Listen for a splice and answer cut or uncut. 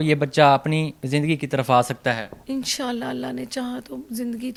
uncut